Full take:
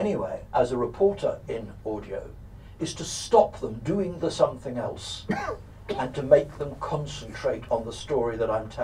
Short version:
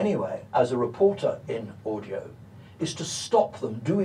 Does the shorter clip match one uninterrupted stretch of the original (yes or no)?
yes